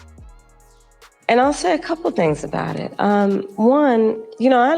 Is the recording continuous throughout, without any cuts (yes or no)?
no